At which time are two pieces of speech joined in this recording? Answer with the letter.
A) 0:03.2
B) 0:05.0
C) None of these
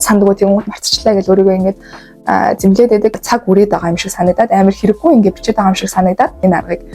A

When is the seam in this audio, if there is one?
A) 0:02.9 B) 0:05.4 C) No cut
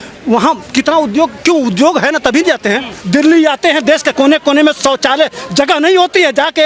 A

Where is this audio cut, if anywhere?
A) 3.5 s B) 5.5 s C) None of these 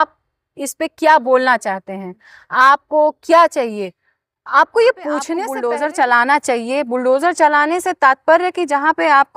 B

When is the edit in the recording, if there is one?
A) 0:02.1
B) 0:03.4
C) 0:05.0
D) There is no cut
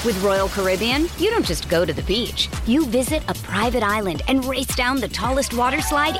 D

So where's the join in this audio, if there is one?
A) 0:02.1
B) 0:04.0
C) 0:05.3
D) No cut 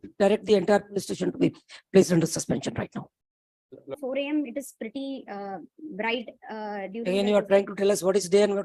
B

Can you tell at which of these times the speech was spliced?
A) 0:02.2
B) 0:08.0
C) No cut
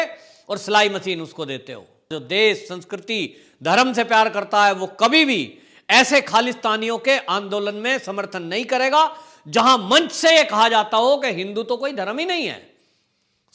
A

